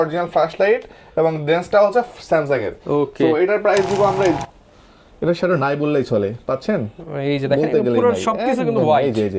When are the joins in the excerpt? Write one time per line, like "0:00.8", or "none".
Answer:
0:04.4